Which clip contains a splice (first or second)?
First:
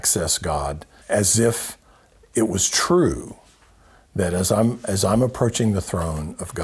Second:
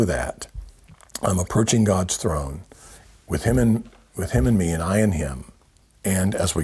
first